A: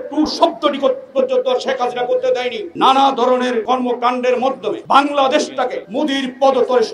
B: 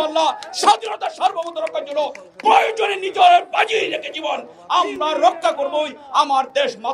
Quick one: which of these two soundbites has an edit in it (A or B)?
A